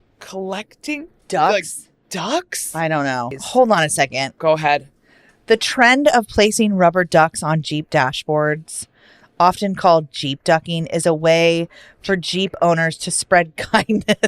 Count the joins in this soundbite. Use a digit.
2